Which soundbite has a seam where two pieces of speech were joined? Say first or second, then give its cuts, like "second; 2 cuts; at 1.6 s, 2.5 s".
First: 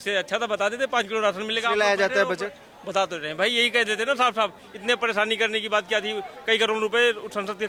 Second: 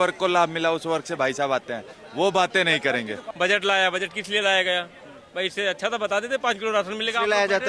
second; 1 cut; at 3.2 s